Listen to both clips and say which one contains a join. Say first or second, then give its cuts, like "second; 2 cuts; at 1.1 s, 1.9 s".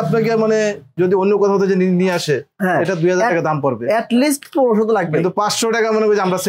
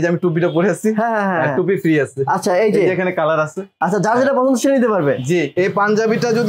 second; 1 cut; at 5.5 s